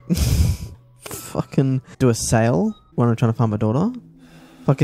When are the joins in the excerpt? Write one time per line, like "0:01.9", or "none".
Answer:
0:01.9
0:02.8